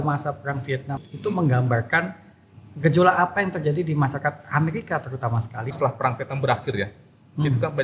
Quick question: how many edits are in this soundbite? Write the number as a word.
two